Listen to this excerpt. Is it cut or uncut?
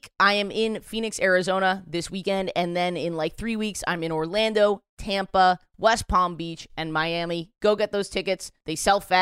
uncut